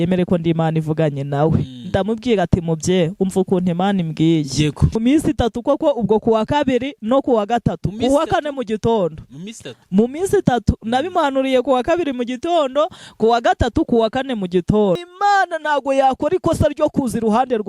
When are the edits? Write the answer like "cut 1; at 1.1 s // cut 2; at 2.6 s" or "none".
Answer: cut 1; at 5.0 s // cut 2; at 15.1 s